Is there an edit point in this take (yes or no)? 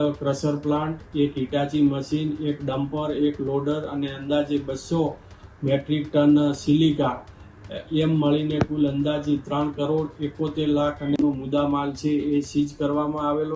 no